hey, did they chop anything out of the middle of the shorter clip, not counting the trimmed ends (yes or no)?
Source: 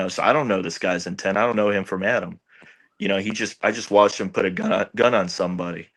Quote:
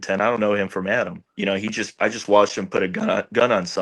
yes